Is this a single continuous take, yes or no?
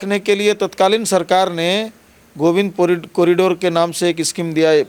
yes